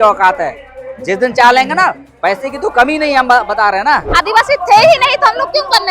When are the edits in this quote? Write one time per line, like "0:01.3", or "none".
0:04.1